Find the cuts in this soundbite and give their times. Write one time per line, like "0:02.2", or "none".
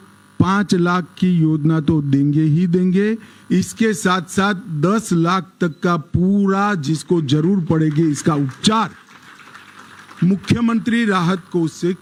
none